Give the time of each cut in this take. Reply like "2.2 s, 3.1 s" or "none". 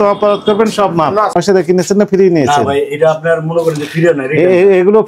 1.3 s